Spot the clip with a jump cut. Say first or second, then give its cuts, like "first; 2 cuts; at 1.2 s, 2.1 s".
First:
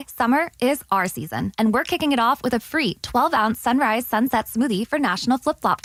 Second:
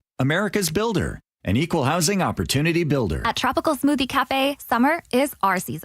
second; 1 cut; at 3.2 s